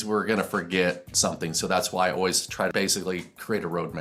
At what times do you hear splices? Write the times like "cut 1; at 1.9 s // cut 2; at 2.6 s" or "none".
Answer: cut 1; at 2.7 s